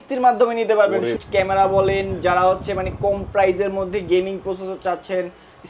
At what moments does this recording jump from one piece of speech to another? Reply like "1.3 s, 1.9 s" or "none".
1.2 s